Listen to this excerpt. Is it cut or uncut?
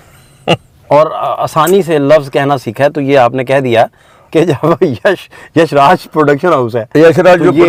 uncut